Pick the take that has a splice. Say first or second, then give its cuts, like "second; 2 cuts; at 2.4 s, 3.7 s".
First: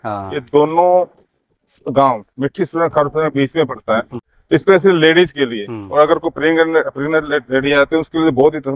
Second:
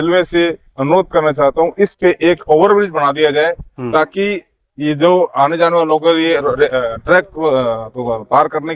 first; 1 cut; at 4.3 s